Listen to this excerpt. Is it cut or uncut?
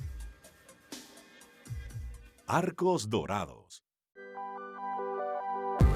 uncut